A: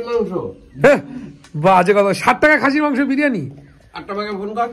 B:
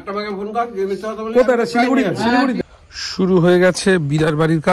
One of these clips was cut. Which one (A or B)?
B